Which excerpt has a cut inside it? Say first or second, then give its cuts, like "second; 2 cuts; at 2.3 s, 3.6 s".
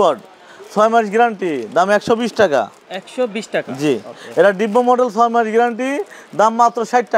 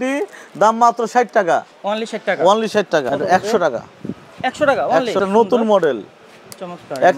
second; 2 cuts; at 3.1 s, 5.2 s